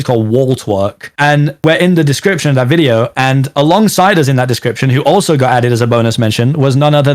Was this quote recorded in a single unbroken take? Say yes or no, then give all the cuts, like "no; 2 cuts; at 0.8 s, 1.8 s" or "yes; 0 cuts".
yes; 0 cuts